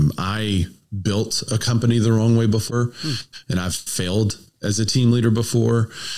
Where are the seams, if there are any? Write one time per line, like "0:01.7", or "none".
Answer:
0:02.7